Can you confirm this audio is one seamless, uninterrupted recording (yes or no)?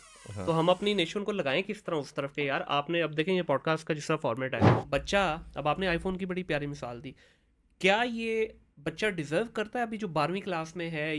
no